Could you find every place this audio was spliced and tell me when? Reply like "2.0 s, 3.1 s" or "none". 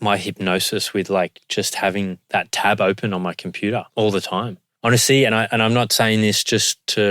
4.6 s